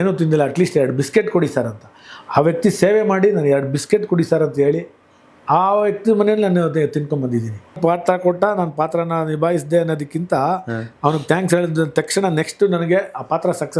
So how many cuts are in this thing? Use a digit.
1